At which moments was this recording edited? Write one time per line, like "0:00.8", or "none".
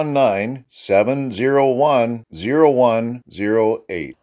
none

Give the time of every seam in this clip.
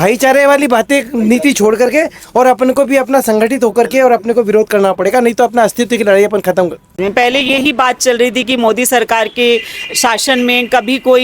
0:07.0

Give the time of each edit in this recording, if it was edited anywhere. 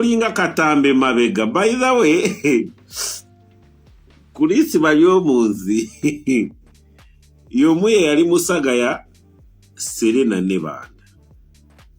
0:11.0

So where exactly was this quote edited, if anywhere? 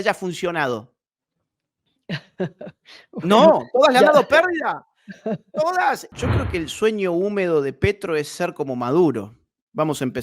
0:06.1

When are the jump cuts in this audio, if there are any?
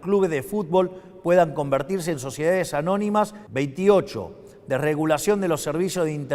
0:03.4

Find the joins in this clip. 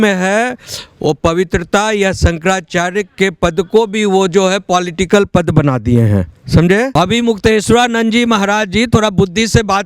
0:06.9

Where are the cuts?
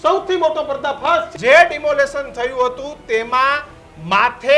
0:01.3

